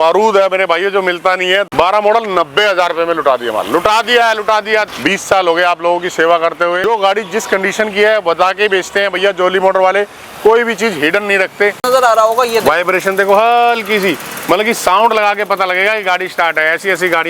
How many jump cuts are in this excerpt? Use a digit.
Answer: 4